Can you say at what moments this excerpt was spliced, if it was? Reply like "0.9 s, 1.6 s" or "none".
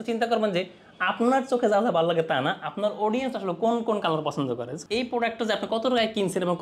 4.7 s